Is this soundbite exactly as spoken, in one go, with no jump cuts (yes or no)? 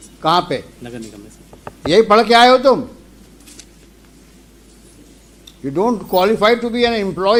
yes